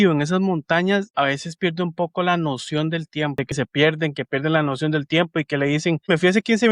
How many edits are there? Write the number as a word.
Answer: one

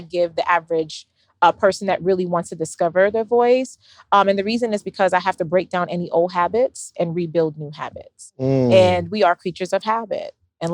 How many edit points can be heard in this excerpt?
zero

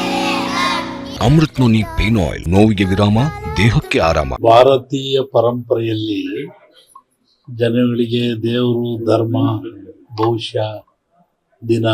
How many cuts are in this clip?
three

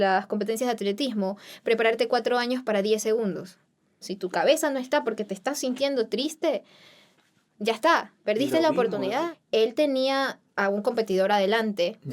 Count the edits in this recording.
two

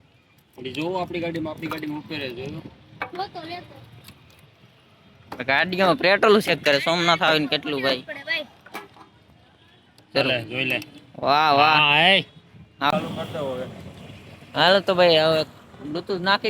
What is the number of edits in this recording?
one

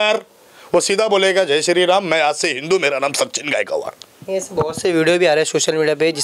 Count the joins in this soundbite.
zero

